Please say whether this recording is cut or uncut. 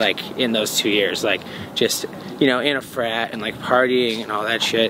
uncut